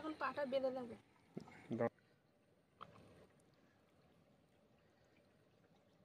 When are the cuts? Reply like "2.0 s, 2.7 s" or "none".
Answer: none